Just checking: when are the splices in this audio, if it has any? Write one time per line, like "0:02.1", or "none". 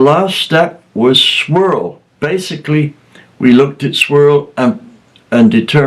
0:02.0